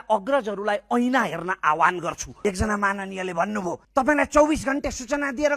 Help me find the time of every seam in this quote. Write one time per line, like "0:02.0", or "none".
0:02.2
0:03.8